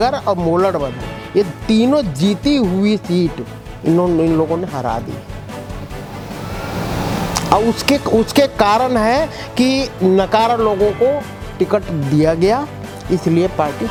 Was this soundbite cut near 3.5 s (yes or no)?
no